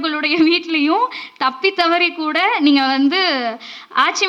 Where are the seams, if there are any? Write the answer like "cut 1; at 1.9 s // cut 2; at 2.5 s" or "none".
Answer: none